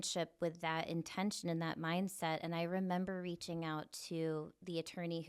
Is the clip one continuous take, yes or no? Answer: yes